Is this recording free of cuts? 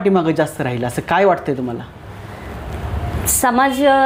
yes; 0 cuts

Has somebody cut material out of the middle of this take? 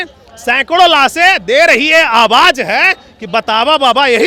no; 0 cuts

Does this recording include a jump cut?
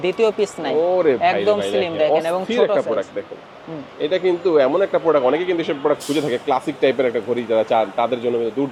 no; 0 cuts

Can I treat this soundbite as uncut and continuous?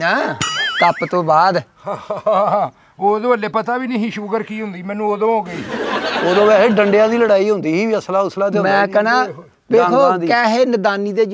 yes; 0 cuts

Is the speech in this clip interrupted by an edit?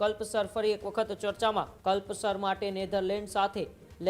yes; 1 cut; at 1.7 s

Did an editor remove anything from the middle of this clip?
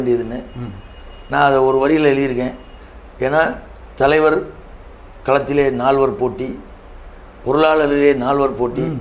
no; 0 cuts

